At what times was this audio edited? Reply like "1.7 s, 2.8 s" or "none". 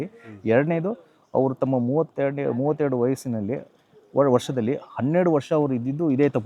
none